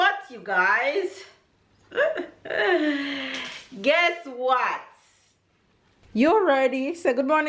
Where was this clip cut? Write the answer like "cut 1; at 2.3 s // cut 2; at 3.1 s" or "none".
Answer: cut 1; at 6.0 s